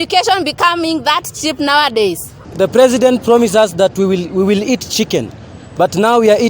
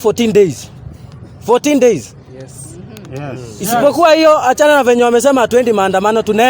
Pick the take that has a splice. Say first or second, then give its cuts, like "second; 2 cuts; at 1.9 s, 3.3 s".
first; 1 cut; at 2.4 s